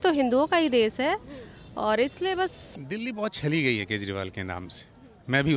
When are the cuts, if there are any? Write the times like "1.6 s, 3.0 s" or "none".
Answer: 2.7 s